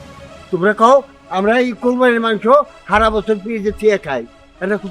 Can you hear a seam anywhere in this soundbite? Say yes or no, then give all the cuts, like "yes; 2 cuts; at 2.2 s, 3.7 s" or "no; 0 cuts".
no; 0 cuts